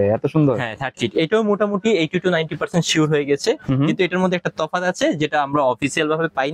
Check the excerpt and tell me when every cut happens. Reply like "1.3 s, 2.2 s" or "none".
none